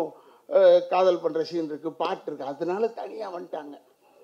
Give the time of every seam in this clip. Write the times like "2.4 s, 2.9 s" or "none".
none